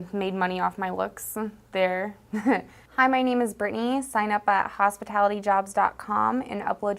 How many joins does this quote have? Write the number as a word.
one